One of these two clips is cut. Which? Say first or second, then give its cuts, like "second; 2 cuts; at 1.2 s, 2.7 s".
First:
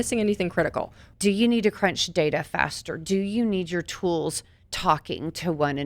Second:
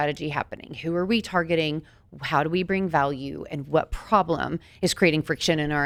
first; 1 cut; at 1.0 s